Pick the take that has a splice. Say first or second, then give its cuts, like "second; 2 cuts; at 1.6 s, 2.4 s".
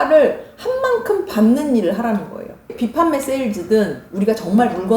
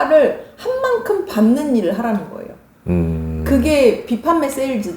first; 1 cut; at 2.7 s